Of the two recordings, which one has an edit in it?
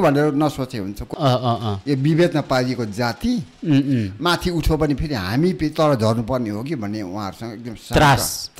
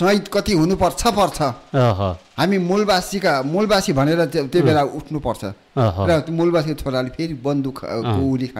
first; 1 cut; at 1.0 s

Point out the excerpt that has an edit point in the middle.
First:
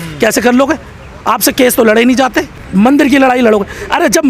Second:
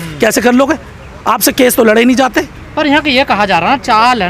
first; 1 cut; at 2.6 s

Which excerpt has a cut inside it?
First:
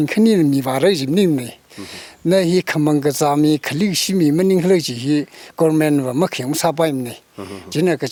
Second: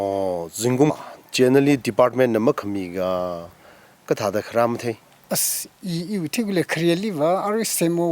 second; 1 cut; at 1.0 s

